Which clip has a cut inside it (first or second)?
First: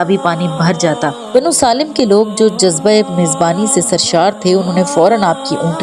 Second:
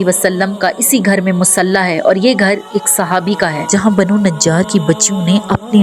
first